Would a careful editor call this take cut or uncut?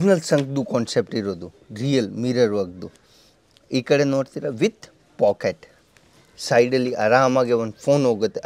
uncut